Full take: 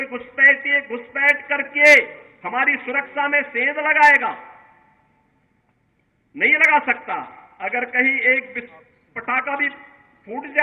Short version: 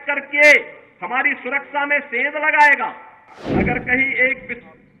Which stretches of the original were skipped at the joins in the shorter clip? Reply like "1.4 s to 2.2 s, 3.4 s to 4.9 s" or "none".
4.8 s to 7.4 s